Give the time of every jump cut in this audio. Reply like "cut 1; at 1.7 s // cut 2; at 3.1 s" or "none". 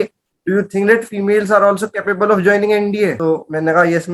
cut 1; at 3.2 s

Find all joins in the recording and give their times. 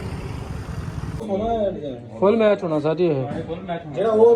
cut 1; at 1.2 s

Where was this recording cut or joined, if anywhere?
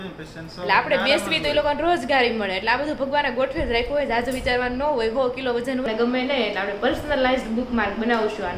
cut 1; at 5.9 s

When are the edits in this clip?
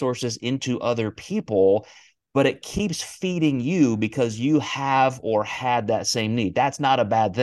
none

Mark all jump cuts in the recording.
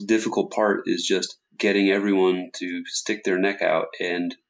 cut 1; at 1.4 s

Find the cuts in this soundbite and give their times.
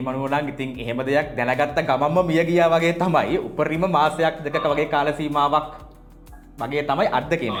none

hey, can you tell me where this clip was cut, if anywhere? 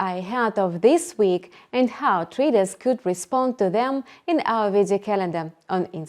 none

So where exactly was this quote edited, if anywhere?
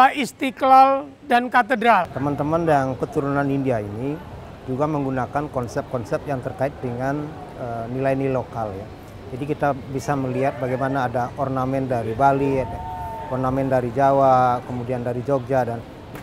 cut 1; at 2.1 s

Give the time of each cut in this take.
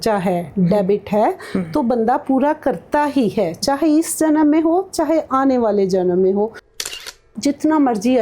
cut 1; at 6.9 s

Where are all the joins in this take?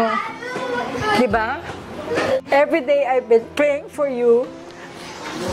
cut 1; at 2.3 s

